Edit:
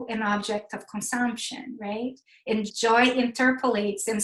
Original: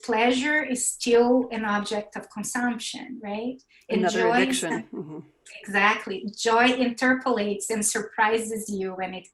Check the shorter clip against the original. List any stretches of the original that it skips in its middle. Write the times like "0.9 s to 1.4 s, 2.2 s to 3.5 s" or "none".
4.0 s to 6.2 s